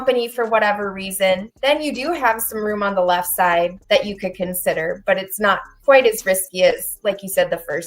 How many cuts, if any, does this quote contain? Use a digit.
1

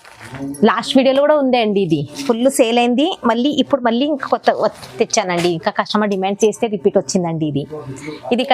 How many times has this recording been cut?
0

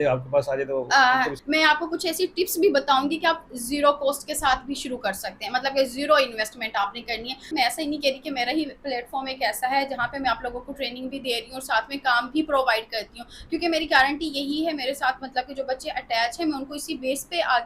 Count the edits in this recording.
2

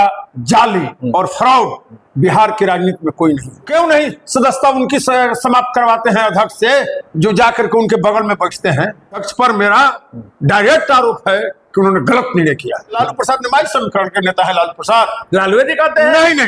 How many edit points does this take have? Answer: 3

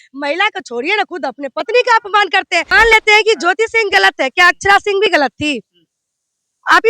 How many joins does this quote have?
1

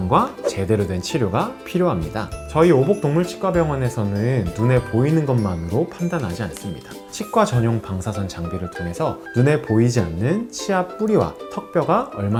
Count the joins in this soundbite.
0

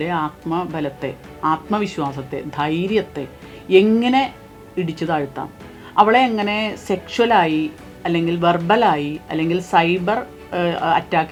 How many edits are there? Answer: 0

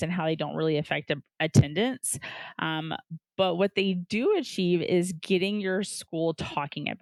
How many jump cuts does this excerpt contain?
0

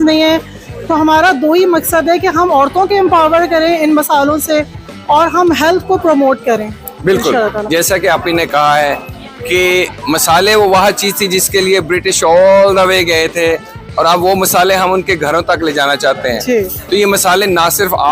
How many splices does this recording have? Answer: 0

